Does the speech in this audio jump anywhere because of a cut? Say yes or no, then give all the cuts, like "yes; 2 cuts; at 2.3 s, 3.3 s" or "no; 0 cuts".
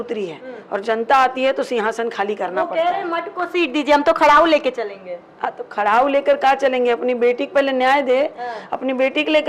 no; 0 cuts